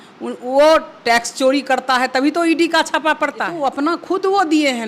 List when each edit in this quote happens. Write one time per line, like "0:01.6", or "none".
0:03.5